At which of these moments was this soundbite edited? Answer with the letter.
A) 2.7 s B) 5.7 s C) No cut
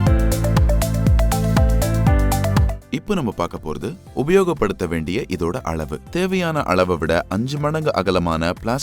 A